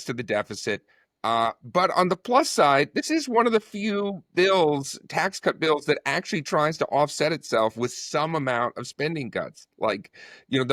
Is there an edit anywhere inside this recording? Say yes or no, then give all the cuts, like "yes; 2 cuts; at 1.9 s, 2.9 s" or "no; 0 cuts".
no; 0 cuts